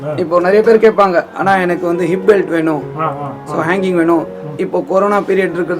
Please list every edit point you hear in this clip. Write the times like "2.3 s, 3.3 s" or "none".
none

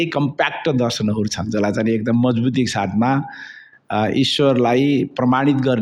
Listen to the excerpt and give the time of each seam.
none

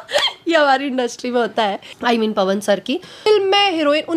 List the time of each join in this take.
1.9 s, 3.3 s

